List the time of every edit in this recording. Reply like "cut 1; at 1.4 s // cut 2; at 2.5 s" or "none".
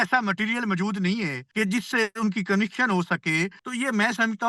cut 1; at 1.4 s // cut 2; at 3.6 s

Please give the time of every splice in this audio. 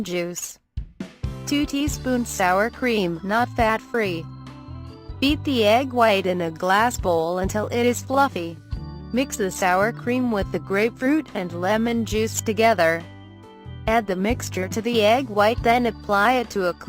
cut 1; at 8.7 s

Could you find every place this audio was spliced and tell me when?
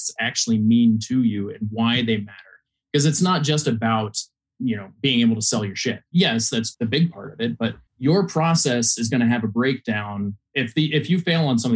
cut 1; at 6.1 s // cut 2; at 6.7 s // cut 3; at 7.9 s

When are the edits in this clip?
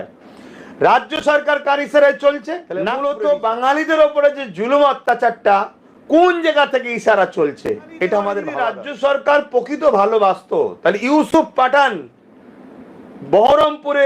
cut 1; at 2.9 s // cut 2; at 8.5 s

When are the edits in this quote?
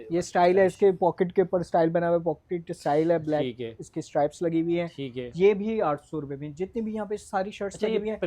none

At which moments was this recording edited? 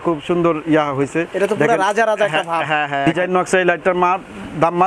cut 1; at 3.1 s

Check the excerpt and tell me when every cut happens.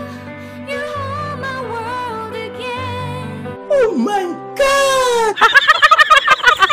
none

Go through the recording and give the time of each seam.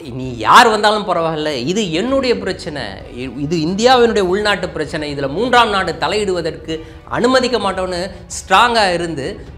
none

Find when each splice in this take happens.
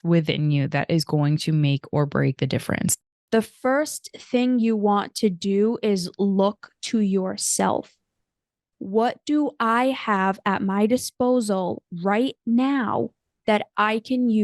cut 1; at 2.9 s

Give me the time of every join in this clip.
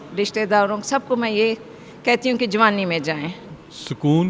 cut 1; at 3.4 s

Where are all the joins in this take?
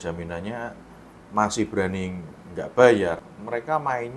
cut 1; at 3.2 s

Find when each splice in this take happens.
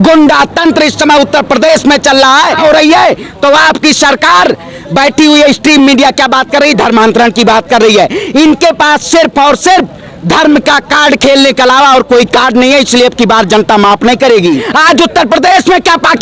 cut 1; at 2.6 s // cut 2; at 14.6 s

